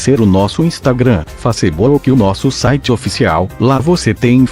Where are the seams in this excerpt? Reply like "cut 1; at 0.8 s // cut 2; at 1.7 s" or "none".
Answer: none